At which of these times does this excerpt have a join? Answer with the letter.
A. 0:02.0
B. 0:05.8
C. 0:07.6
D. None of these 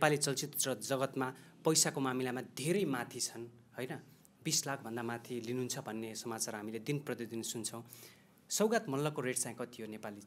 D